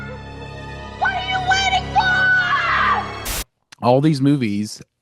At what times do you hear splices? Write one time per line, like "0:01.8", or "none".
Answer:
0:03.3